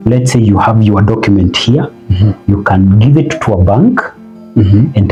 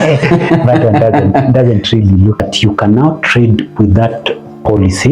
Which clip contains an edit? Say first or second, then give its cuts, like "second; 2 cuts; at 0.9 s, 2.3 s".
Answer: second; 1 cut; at 2.4 s